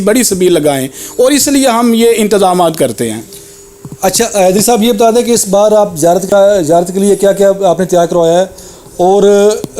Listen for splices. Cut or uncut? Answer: uncut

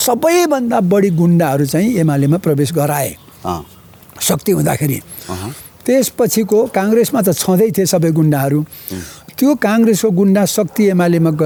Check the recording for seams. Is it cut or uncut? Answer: uncut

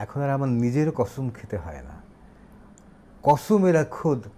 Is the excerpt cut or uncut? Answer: uncut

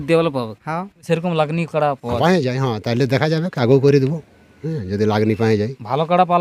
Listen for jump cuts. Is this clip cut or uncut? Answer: cut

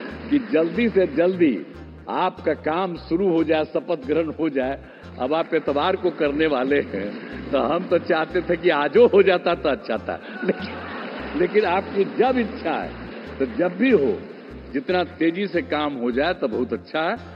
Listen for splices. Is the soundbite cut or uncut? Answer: uncut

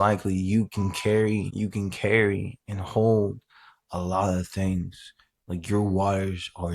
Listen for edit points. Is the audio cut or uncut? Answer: cut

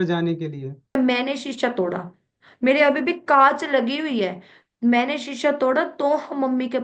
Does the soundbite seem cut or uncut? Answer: cut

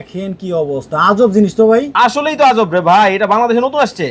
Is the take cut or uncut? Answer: uncut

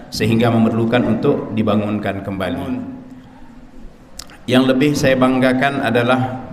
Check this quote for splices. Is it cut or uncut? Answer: cut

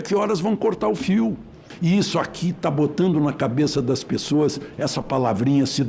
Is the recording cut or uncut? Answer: cut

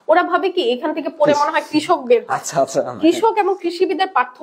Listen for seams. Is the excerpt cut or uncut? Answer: uncut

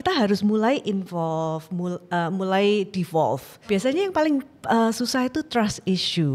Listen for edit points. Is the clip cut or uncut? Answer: cut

